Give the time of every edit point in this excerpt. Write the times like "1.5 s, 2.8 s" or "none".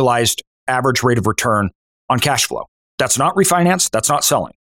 1.9 s, 2.8 s